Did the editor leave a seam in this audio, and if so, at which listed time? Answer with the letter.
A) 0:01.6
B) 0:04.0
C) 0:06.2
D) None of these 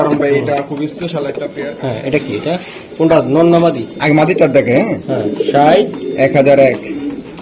A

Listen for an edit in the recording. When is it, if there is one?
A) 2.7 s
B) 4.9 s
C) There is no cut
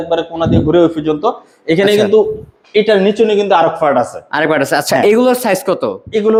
C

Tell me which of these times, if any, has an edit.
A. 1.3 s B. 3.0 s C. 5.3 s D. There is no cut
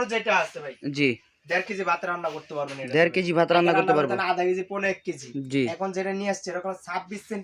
D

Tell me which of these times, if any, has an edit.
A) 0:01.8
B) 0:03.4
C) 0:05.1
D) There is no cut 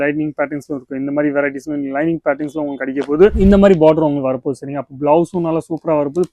B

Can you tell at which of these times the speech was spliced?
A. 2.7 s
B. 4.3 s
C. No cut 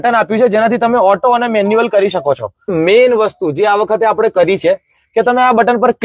A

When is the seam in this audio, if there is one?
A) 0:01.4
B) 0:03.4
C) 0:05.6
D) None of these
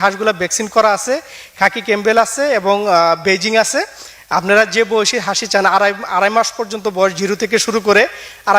D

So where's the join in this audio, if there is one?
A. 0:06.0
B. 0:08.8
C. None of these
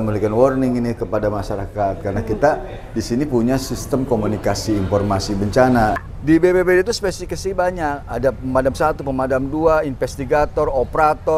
A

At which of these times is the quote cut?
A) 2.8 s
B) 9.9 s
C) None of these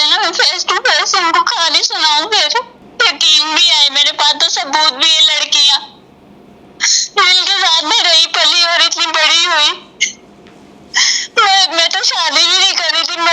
A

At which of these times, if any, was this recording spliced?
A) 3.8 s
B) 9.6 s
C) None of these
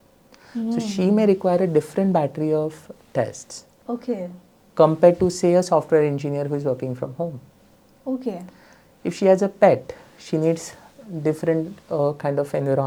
C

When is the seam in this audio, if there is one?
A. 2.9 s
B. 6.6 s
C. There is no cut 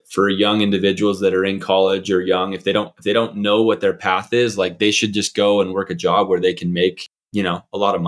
C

